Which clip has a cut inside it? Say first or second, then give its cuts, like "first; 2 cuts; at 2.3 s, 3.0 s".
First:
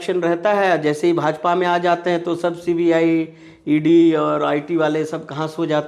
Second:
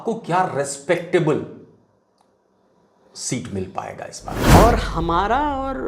second; 1 cut; at 4.3 s